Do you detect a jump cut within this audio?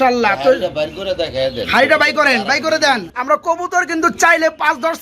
yes; 1 cut; at 3.1 s

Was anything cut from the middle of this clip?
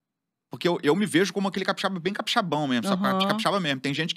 no; 0 cuts

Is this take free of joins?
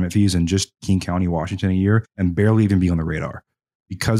no; 1 cut; at 2.1 s

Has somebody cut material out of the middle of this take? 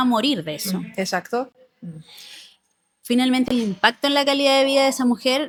no; 0 cuts

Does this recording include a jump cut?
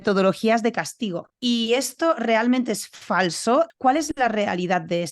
yes; 2 cuts; at 1.3 s, 3.7 s

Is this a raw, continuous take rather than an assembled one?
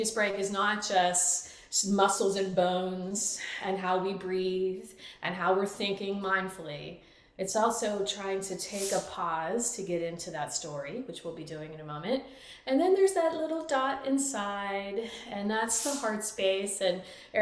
yes; 0 cuts

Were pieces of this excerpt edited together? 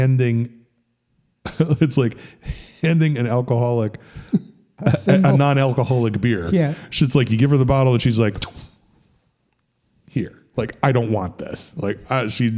no; 0 cuts

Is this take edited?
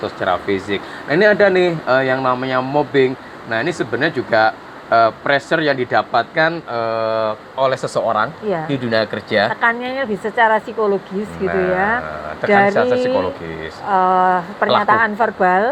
no; 0 cuts

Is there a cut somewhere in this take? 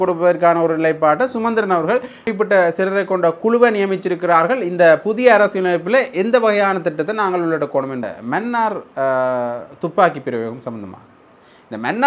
yes; 2 cuts; at 2.2 s, 8.1 s

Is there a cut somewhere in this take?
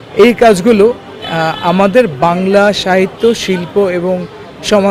no; 0 cuts

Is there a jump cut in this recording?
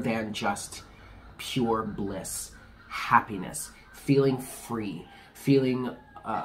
no; 0 cuts

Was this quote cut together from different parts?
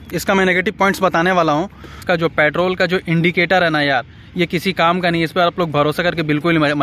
yes; 1 cut; at 2.0 s

